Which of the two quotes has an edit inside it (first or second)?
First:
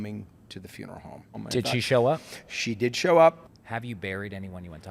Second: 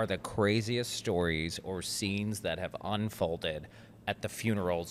first